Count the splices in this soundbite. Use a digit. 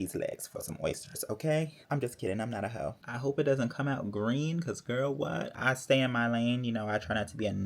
3